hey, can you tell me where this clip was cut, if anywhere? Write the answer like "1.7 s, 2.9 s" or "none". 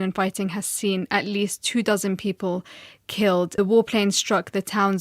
3.6 s